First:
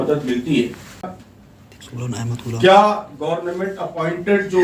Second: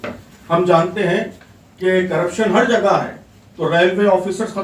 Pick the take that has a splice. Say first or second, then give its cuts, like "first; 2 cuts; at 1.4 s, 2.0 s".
first; 1 cut; at 1.2 s